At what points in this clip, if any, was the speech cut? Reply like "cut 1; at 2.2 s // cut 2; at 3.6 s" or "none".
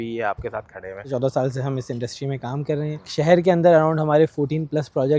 cut 1; at 1.1 s // cut 2; at 3.1 s